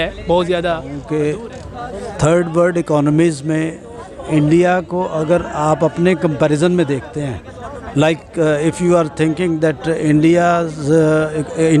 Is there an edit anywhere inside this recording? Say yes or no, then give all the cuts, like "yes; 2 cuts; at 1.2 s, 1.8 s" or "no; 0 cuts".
yes; 1 cut; at 0.9 s